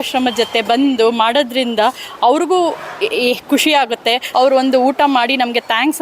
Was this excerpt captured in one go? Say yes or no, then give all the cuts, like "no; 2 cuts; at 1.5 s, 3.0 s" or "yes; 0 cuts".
no; 1 cut; at 4.2 s